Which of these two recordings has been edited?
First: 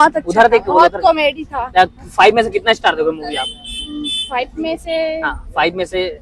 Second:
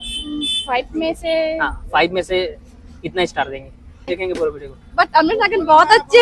second; 1 cut; at 4.1 s

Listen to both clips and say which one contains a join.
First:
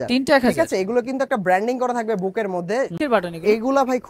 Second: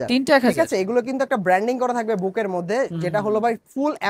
first; 1 cut; at 2.9 s

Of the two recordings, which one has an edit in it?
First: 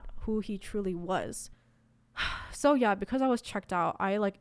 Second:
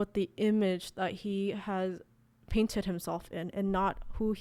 first; 1 cut; at 1.5 s

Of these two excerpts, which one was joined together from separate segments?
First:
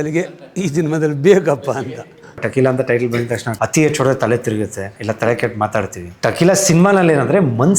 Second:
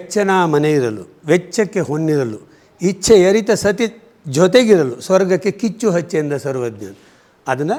first; 4 cuts; at 2.4 s, 3.4 s, 4.9 s, 6.1 s

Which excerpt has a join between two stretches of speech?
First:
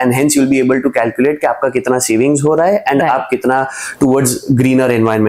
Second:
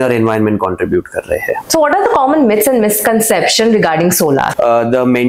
second; 2 cuts; at 1.6 s, 4.5 s

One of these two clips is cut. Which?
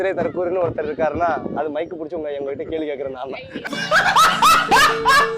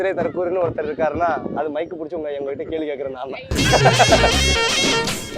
second; 1 cut; at 3.6 s

